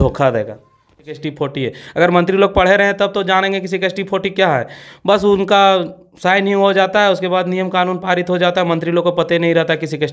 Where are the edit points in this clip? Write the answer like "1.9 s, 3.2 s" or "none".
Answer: 1.2 s